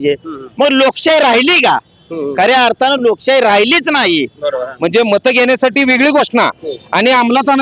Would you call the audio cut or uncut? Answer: cut